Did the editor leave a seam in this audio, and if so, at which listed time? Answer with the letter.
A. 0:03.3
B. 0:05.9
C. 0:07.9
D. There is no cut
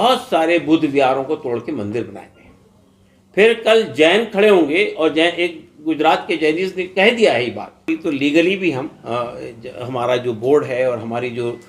C